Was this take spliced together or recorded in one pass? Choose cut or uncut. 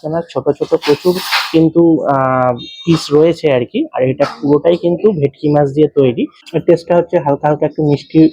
cut